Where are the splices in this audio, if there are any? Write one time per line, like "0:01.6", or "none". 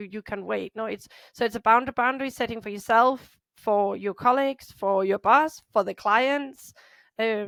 none